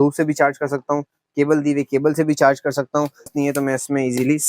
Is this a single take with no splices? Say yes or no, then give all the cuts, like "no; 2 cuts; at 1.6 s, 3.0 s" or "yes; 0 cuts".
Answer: no; 1 cut; at 3.3 s